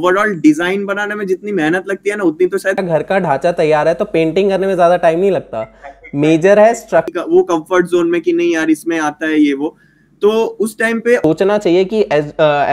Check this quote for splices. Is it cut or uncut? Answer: cut